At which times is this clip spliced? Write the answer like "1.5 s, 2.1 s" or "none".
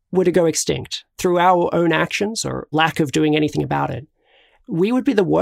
1.1 s, 2.7 s